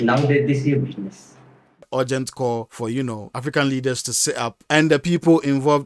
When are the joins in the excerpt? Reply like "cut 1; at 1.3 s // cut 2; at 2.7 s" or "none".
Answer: cut 1; at 1.8 s

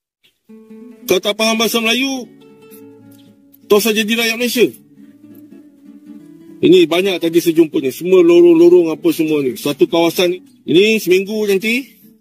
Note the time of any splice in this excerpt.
cut 1; at 10.3 s

